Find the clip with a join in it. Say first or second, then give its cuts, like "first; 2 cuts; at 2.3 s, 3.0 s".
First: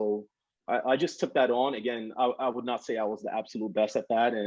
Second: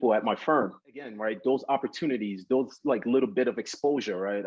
second; 1 cut; at 1.2 s